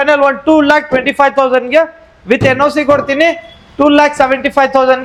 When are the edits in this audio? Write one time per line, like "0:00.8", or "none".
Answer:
none

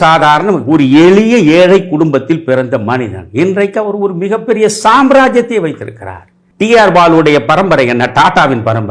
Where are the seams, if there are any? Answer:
0:06.4

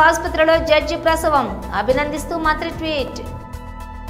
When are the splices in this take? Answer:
0:03.2

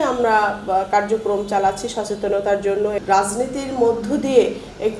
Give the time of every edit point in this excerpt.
0:03.0

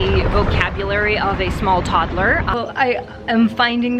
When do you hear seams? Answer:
0:02.5

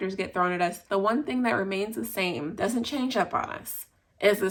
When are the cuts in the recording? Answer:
none

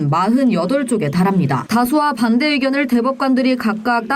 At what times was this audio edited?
0:01.6

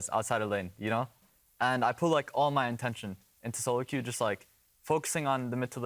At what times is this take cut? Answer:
0:01.2

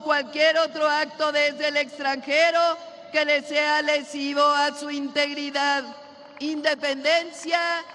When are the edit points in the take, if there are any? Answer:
none

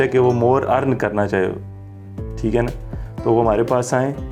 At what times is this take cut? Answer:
none

